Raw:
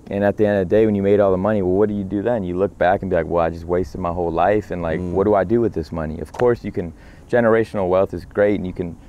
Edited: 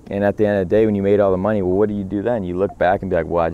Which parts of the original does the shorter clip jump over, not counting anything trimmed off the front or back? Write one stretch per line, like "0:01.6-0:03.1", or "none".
none